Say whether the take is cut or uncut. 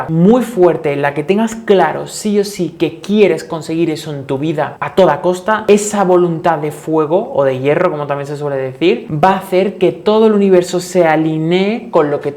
uncut